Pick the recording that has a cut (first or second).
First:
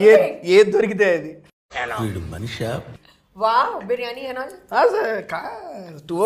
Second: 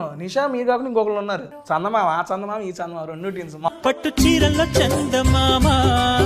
second